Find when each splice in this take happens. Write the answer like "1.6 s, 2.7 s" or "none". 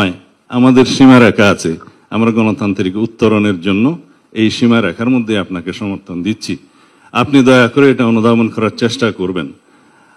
none

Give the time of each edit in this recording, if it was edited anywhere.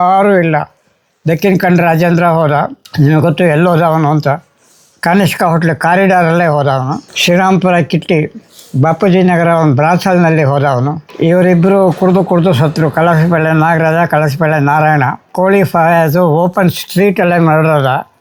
none

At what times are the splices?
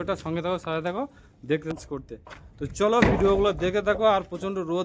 1.7 s

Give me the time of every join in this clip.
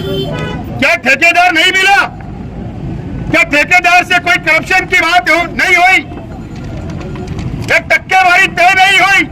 none

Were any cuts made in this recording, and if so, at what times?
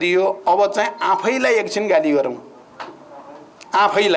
none

